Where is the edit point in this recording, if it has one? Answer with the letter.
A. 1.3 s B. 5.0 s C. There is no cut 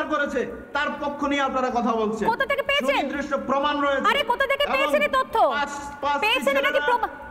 C